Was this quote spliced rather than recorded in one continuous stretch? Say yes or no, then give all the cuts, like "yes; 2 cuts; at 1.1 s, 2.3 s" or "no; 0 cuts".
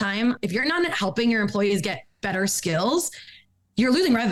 no; 0 cuts